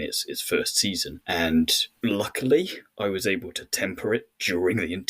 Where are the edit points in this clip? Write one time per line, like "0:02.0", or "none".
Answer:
0:01.1
0:01.8